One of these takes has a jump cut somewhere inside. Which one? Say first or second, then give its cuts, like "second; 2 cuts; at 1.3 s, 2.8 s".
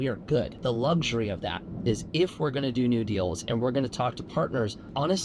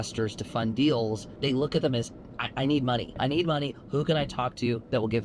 second; 2 cuts; at 1.3 s, 3.1 s